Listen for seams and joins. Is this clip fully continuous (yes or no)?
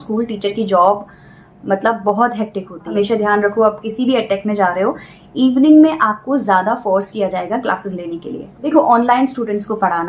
no